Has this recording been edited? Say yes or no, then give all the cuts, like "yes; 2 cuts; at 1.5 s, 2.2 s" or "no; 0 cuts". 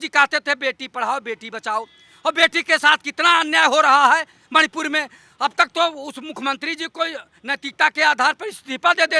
no; 0 cuts